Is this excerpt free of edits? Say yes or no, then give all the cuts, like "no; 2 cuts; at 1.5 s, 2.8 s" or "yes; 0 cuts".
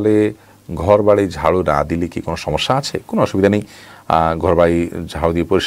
yes; 0 cuts